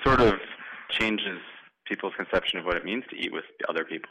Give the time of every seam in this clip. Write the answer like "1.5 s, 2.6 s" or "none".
0.9 s

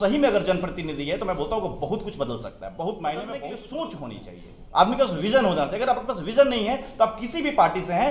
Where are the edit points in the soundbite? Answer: 3.4 s

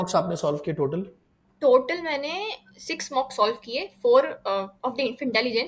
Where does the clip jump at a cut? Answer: none

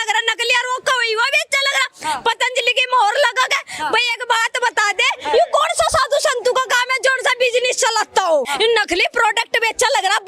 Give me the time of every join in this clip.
8.5 s

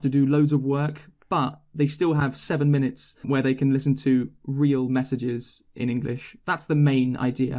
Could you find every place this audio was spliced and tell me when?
none

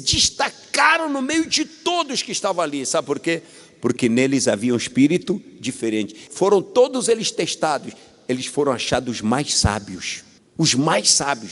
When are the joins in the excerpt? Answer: 6.2 s

